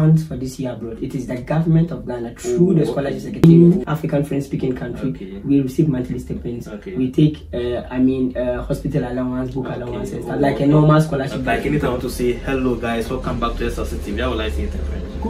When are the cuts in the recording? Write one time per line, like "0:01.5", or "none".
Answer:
0:03.4
0:11.4